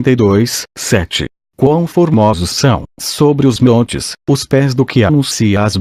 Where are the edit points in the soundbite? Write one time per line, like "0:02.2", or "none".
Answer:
none